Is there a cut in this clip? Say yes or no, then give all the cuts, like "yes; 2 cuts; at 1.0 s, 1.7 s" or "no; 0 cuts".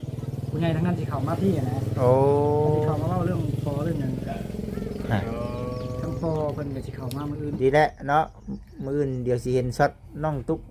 yes; 1 cut; at 7.6 s